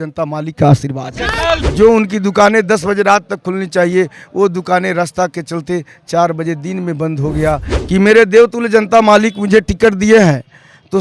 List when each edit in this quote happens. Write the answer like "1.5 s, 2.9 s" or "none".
1.7 s, 7.7 s